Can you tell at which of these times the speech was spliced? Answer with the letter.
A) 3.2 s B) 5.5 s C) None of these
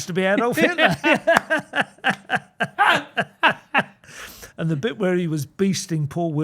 C